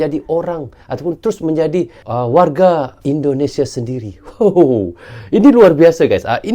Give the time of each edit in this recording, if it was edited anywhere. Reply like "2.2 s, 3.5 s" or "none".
2.0 s, 2.9 s